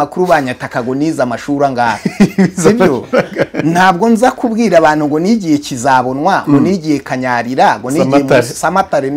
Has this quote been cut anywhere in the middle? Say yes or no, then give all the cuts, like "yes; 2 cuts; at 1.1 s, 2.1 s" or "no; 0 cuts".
no; 0 cuts